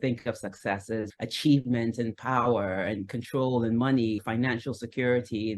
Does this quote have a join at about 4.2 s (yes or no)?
yes